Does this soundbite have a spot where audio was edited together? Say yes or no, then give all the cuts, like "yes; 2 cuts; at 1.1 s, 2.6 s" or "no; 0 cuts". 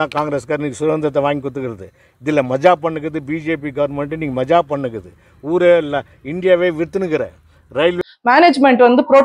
yes; 1 cut; at 8.0 s